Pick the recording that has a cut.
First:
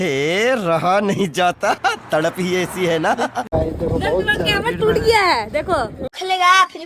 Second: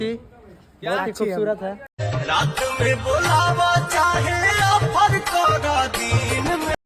first; 1 cut; at 3.5 s

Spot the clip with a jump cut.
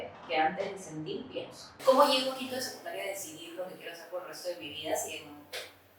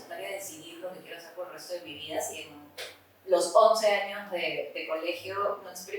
first; 1 cut; at 1.6 s

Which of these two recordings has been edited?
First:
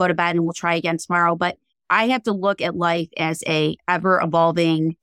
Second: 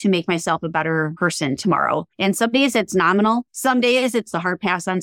second; 4 cuts; at 1.1 s, 2.1 s, 3.5 s, 4.3 s

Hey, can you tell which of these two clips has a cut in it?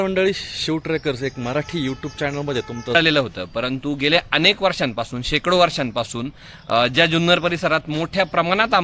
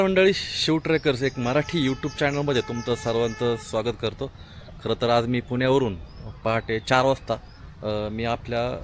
first; 1 cut; at 2.9 s

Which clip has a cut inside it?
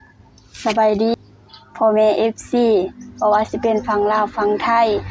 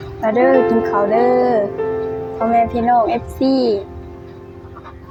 first; 1 cut; at 1.1 s

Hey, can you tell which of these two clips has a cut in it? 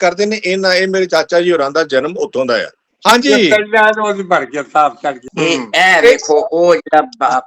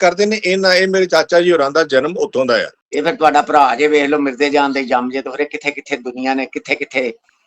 second; 1 cut; at 2.8 s

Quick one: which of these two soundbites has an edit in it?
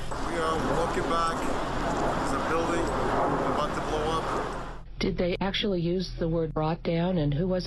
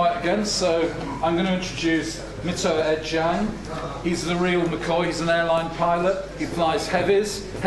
second; 1 cut; at 4.7 s

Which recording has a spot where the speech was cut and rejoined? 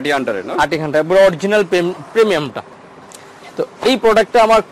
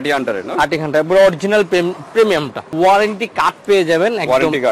second; 1 cut; at 2.6 s

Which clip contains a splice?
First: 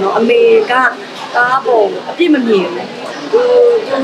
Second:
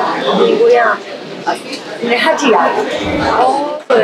second; 1 cut; at 3.1 s

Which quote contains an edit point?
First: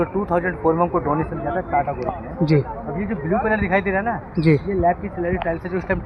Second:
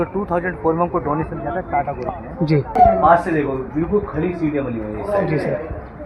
second; 1 cut; at 2.8 s

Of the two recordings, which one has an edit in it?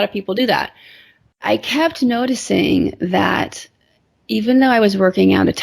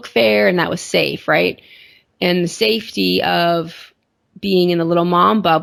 first; 1 cut; at 1.4 s

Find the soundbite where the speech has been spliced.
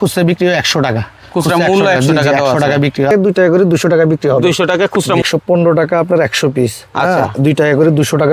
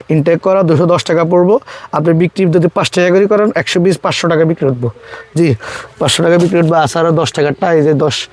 first; 2 cuts; at 3.1 s, 5.2 s

